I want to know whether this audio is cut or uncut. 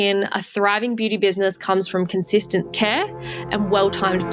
cut